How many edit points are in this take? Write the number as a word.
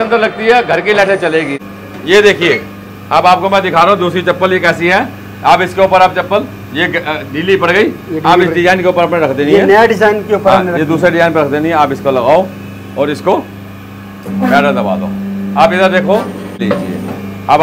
two